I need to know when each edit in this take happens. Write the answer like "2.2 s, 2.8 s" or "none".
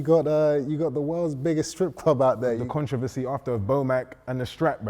2.6 s